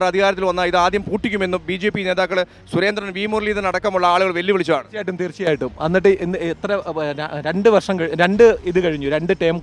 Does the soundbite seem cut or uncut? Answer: uncut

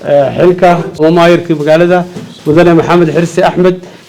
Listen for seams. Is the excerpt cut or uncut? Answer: cut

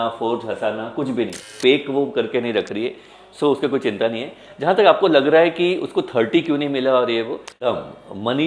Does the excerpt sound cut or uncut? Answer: cut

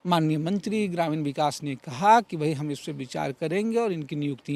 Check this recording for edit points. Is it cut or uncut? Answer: uncut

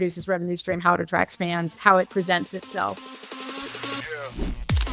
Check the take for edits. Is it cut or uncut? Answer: cut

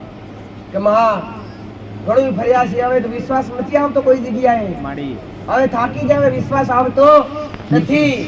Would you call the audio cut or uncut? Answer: uncut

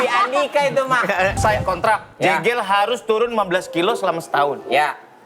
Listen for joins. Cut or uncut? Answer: cut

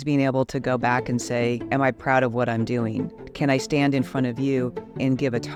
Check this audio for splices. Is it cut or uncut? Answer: uncut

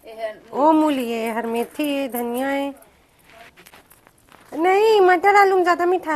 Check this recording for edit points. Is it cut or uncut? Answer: cut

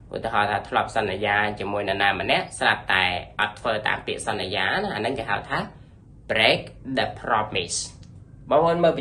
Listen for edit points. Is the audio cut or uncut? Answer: uncut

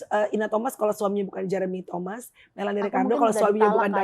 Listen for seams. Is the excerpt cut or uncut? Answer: uncut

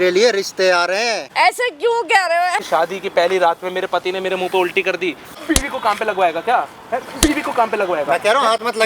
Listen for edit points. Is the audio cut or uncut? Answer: cut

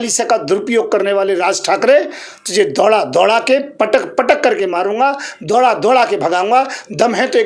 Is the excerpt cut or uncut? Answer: uncut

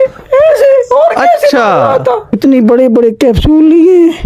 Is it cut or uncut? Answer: cut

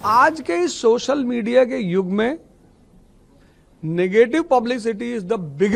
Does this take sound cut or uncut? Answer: uncut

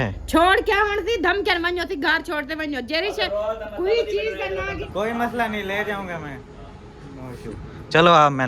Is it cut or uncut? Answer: cut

